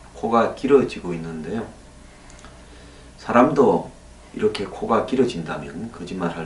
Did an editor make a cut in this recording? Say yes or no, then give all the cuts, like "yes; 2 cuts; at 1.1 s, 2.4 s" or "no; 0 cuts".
yes; 1 cut; at 3.9 s